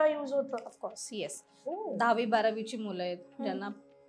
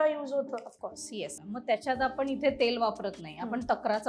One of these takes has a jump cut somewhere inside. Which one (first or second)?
second